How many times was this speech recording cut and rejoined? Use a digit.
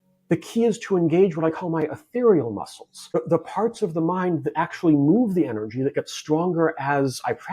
1